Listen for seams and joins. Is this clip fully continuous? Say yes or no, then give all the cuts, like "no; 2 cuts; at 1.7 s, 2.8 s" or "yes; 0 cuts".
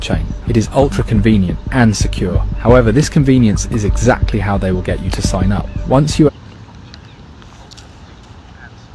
yes; 0 cuts